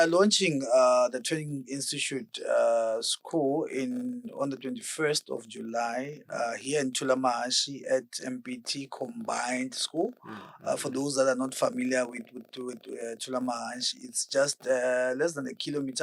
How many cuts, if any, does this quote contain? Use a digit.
0